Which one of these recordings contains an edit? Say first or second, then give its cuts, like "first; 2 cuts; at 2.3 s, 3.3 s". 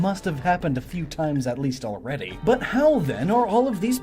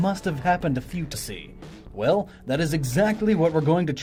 first; 1 cut; at 1.1 s